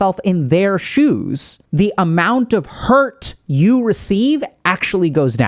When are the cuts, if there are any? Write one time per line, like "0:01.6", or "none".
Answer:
none